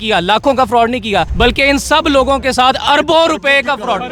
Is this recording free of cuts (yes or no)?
no